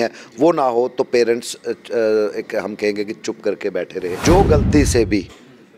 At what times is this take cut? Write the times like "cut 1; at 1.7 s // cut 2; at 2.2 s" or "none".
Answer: cut 1; at 4.1 s